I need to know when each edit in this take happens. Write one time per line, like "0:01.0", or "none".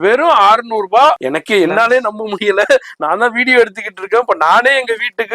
0:01.2